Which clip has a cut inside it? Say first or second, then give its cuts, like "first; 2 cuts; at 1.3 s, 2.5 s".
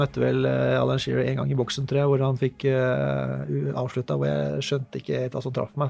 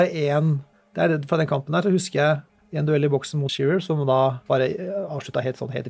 second; 2 cuts; at 2.6 s, 4.4 s